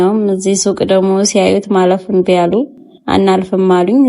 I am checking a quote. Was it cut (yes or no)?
no